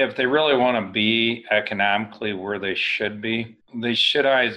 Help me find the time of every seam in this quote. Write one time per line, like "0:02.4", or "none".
0:03.6